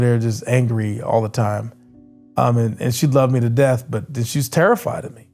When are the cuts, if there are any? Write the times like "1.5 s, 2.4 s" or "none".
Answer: none